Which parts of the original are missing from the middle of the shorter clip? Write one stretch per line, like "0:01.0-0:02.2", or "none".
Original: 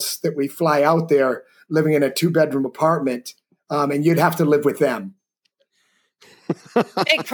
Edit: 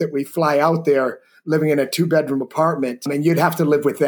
0:03.3-0:03.9